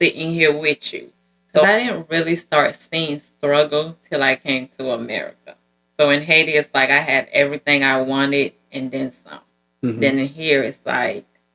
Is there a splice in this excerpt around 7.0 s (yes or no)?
no